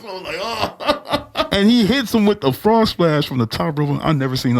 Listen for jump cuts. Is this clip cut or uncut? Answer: cut